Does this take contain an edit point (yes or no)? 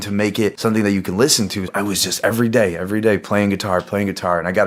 no